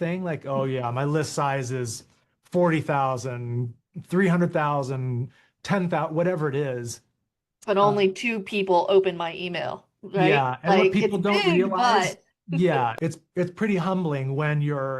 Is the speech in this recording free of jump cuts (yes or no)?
no